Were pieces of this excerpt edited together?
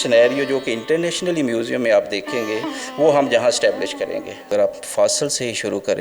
yes; 1 cut; at 4.5 s

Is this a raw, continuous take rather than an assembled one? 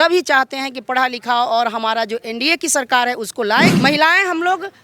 no; 1 cut; at 3.7 s

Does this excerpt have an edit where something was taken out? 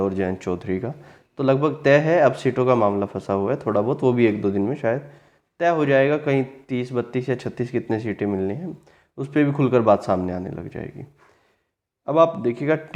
no; 0 cuts

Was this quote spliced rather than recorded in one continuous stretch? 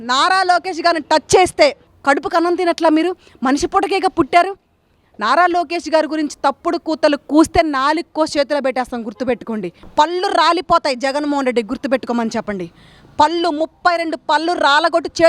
yes; 2 cuts; at 1.9 s, 9.8 s

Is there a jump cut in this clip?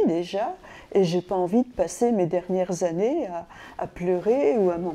no; 0 cuts

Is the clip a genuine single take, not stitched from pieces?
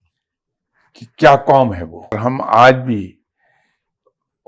no; 1 cut; at 2.2 s

